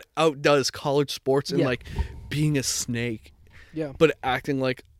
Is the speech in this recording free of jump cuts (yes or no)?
yes